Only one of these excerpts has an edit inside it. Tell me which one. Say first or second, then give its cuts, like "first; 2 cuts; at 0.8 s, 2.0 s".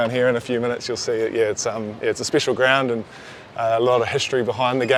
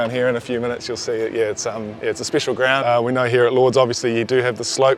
second; 1 cut; at 2.8 s